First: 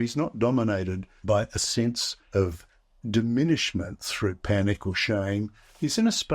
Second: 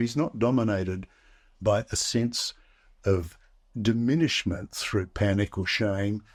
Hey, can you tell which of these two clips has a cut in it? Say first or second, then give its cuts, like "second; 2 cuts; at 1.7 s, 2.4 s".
first; 2 cuts; at 1.1 s, 2.1 s